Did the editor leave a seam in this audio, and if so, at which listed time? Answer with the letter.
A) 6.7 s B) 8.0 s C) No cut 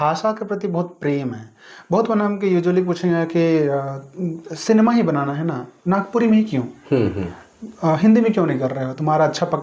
C